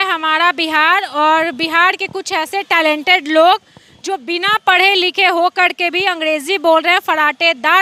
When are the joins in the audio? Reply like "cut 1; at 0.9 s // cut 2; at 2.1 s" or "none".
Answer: none